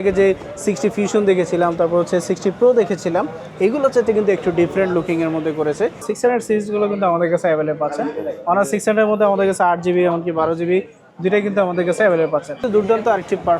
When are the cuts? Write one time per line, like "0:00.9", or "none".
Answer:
0:06.0
0:12.6